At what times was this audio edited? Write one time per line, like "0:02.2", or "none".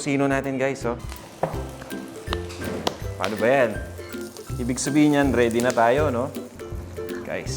0:01.1